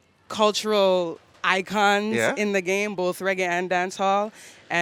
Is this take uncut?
yes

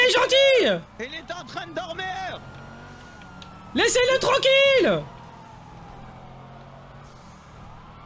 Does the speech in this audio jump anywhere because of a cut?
no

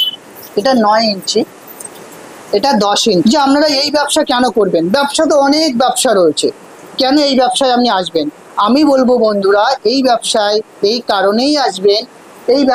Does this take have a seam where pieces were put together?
yes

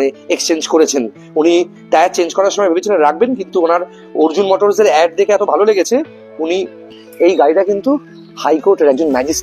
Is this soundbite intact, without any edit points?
no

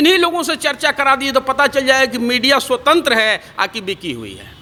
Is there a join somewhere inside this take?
no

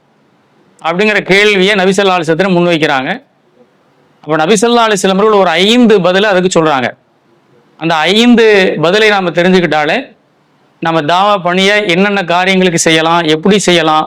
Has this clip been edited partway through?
no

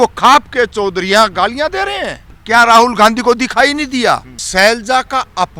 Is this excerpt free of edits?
no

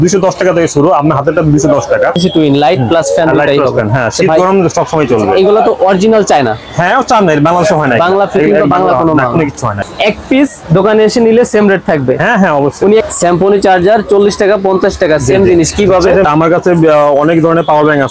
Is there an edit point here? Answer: yes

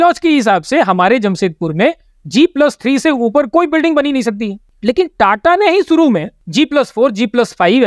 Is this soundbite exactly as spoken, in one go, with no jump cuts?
no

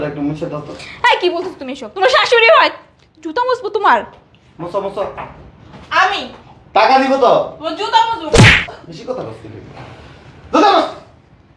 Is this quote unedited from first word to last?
yes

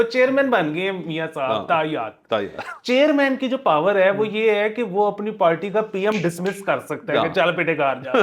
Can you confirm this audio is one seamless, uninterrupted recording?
yes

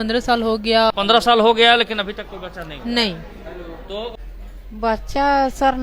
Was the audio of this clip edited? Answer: yes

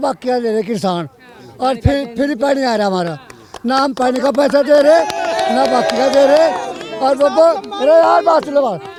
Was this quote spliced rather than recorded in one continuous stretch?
no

